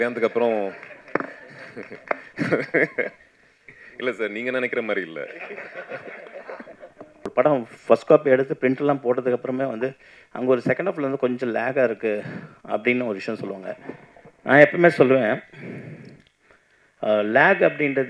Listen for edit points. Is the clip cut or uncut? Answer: cut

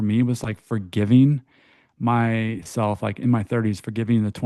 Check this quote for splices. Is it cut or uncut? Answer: uncut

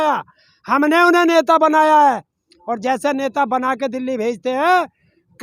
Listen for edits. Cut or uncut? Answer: uncut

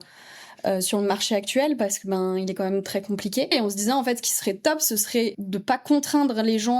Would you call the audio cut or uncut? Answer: cut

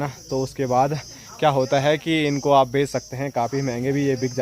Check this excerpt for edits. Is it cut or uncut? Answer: uncut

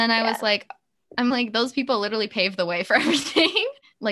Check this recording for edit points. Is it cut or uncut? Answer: uncut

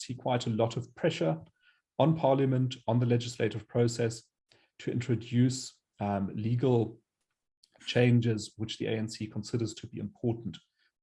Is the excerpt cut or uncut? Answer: uncut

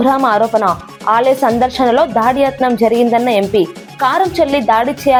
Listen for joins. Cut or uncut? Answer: uncut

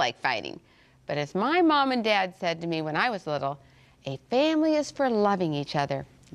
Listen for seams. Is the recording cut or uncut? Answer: cut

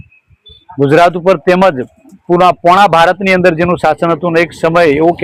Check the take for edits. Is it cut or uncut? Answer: uncut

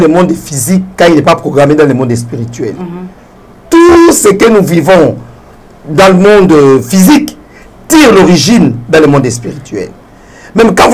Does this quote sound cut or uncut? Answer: uncut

